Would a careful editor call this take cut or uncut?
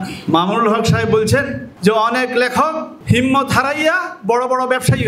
cut